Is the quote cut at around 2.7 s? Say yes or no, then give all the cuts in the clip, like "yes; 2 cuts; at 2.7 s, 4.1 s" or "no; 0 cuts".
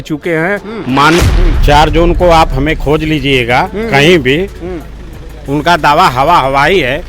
no; 1 cut; at 1.2 s